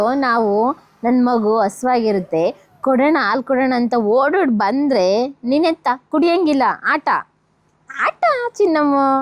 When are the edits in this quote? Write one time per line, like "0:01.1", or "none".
none